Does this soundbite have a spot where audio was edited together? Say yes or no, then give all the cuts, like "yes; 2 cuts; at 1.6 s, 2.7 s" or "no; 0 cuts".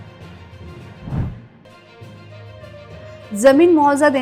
yes; 1 cut; at 1.2 s